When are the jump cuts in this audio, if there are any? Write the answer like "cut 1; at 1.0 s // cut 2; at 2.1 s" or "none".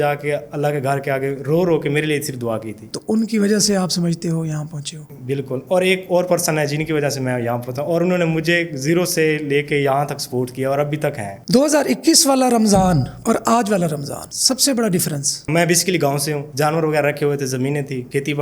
none